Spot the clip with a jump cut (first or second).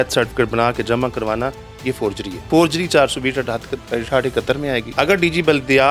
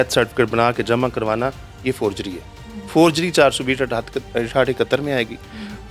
first